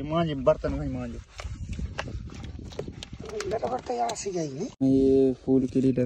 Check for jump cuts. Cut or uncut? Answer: cut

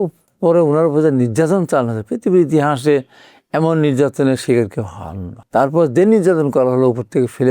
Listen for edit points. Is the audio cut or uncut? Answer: cut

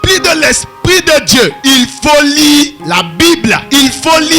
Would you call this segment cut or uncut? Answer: cut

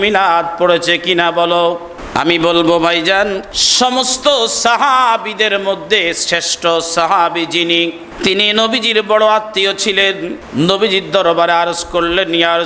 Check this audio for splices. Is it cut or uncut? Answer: cut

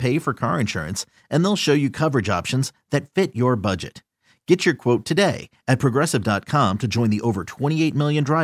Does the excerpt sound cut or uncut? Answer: uncut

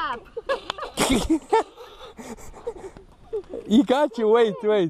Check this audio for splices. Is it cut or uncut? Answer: uncut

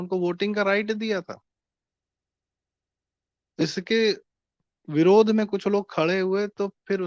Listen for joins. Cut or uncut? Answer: uncut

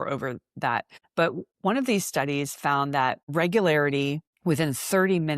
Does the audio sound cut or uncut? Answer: cut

